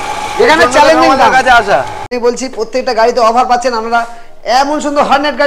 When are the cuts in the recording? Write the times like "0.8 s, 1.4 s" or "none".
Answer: 2.1 s

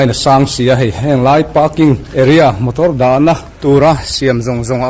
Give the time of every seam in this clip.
2.0 s, 3.5 s

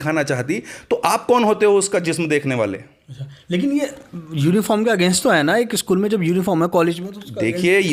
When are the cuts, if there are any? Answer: none

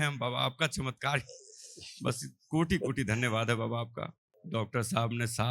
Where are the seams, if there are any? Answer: 4.4 s

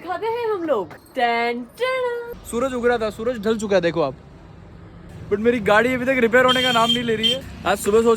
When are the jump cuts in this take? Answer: 2.3 s, 7.3 s

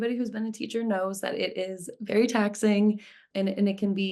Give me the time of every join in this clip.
3.2 s

